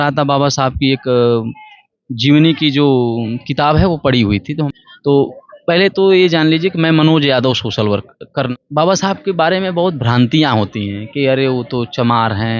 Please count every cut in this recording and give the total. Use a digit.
2